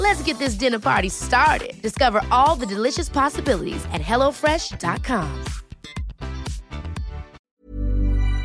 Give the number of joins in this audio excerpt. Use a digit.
1